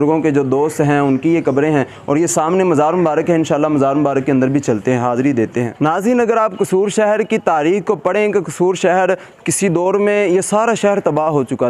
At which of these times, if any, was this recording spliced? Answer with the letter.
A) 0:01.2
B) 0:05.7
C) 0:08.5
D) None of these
B